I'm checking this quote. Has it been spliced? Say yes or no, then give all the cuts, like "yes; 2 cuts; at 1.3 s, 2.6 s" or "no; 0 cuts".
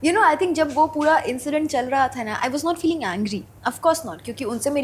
no; 0 cuts